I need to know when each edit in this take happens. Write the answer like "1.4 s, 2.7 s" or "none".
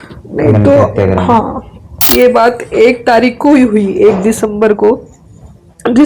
2.0 s